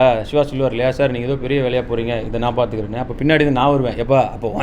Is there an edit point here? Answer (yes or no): no